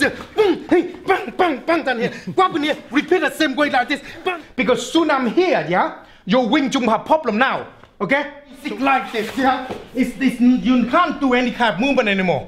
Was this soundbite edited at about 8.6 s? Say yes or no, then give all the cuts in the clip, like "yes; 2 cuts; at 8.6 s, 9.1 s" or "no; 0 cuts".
yes; 2 cuts; at 4.4 s, 8.6 s